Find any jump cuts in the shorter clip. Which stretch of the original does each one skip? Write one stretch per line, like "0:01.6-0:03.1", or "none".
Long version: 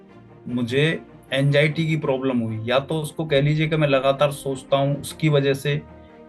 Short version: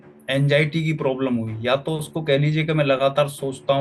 none